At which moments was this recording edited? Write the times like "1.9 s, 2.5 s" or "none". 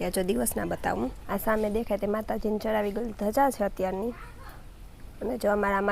1.2 s